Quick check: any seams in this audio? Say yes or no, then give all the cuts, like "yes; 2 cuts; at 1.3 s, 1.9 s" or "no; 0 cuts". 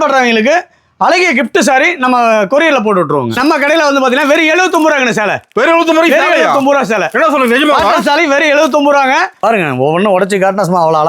yes; 2 cuts; at 3.3 s, 9.4 s